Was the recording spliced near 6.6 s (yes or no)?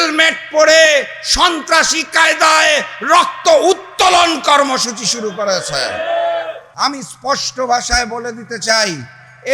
yes